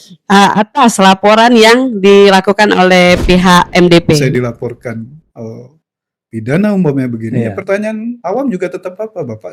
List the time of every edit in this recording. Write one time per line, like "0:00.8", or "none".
0:04.2